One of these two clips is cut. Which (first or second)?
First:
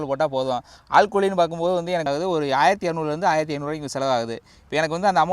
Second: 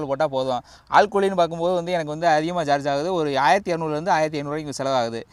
first